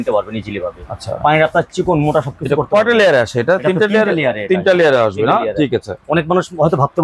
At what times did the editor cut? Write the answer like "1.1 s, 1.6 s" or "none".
none